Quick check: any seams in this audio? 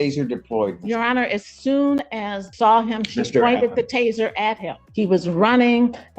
yes; 2 cuts; at 2.4 s, 4.8 s

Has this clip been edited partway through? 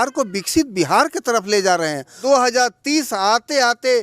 yes; 1 cut; at 2.2 s

